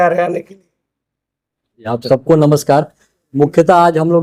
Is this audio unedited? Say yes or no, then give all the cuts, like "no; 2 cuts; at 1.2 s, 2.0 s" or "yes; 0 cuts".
yes; 0 cuts